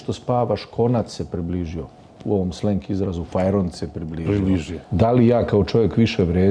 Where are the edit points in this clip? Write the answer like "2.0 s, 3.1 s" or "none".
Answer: 4.8 s